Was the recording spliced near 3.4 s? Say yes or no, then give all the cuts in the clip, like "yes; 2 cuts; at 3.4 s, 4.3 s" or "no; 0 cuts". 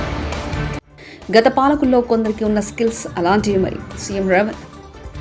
no; 1 cut; at 0.9 s